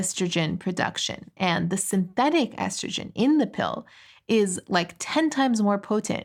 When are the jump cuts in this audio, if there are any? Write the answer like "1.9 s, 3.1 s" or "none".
none